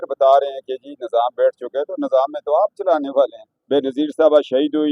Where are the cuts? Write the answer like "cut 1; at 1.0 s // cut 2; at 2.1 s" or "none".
cut 1; at 3.6 s